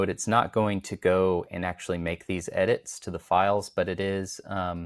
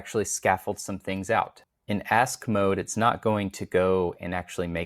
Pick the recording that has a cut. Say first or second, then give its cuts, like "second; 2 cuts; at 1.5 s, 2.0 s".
second; 1 cut; at 1.7 s